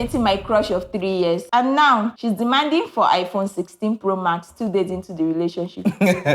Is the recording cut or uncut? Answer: cut